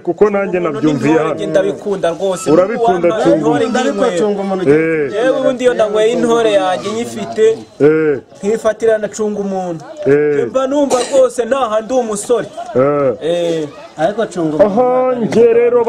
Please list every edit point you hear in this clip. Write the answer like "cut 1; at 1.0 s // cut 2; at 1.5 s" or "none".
none